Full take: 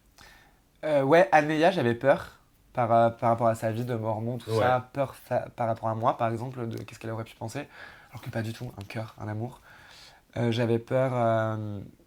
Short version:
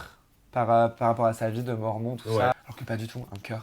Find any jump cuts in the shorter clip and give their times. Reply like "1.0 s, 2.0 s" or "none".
2.5 s